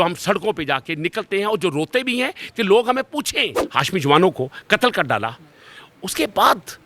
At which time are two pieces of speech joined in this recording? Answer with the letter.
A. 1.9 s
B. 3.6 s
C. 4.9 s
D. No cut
B